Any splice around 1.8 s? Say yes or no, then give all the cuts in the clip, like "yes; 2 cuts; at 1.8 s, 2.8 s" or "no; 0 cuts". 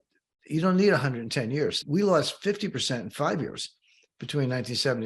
yes; 1 cut; at 1.8 s